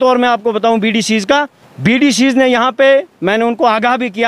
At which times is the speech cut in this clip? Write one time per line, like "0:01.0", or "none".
0:01.6